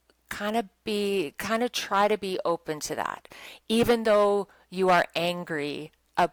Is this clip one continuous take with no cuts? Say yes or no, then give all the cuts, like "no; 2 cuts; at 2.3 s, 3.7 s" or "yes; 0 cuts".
yes; 0 cuts